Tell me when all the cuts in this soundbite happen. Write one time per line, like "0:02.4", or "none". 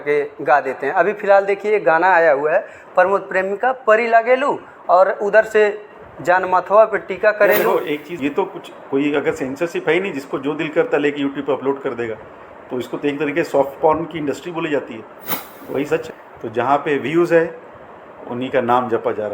0:08.2
0:16.1